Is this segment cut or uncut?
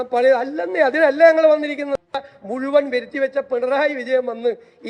uncut